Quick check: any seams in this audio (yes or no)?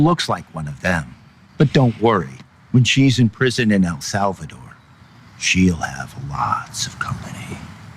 yes